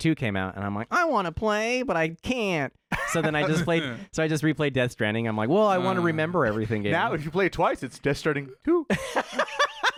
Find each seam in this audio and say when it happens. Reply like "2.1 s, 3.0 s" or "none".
none